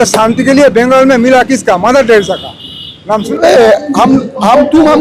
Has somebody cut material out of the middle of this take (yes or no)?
yes